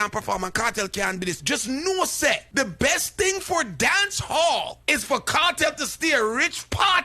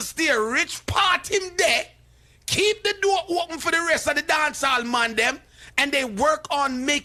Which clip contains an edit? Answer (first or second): first